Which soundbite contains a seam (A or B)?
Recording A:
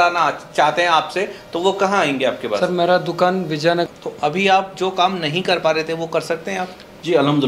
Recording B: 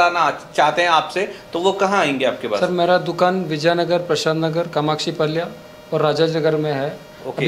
A